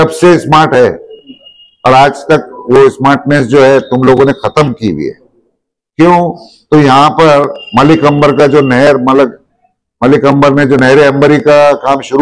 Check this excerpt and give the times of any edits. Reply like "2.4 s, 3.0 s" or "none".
none